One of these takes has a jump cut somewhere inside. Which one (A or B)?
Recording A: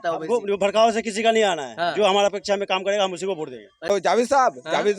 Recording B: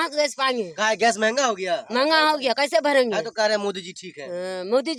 A